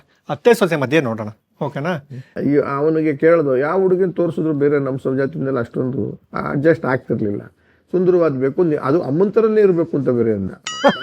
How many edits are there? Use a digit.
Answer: 1